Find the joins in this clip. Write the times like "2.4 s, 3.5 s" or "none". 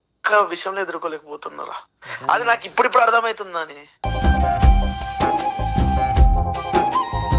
none